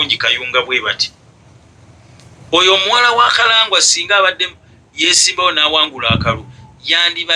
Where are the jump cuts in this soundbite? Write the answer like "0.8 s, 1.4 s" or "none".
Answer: none